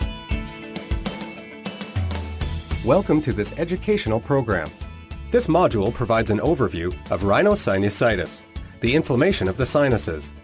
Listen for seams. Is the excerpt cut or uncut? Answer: uncut